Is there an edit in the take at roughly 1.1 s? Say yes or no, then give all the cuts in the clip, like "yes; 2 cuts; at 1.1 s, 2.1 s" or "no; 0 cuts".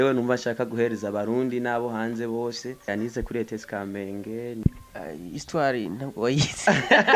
no; 2 cuts; at 2.9 s, 4.6 s